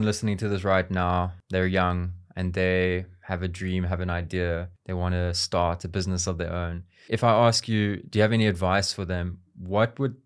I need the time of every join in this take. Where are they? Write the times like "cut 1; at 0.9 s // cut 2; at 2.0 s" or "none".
cut 1; at 1.4 s // cut 2; at 4.8 s // cut 3; at 7.1 s